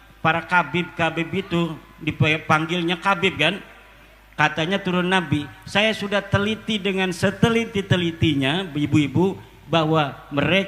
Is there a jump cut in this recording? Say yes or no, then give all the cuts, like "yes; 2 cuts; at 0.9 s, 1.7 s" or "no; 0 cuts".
no; 0 cuts